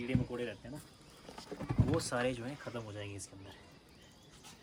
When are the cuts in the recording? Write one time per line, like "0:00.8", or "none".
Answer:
none